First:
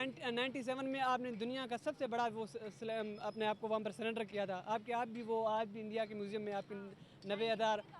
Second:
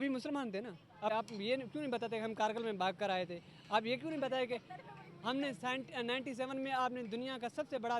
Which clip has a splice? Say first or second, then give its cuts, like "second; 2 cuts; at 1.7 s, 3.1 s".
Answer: second; 1 cut; at 1.1 s